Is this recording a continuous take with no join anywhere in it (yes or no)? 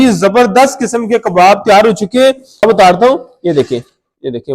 no